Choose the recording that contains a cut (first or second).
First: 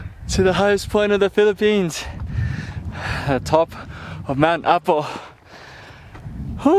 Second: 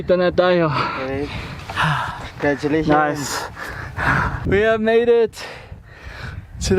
second